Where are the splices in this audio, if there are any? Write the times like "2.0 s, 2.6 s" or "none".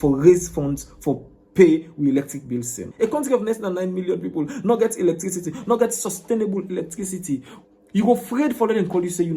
2.9 s, 7.5 s